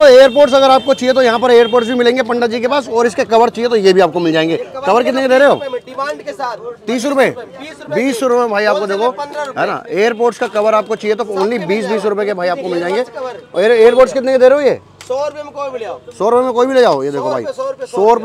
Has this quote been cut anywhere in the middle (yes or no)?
no